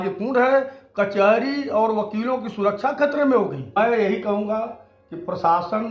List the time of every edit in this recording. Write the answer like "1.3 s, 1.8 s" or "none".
3.8 s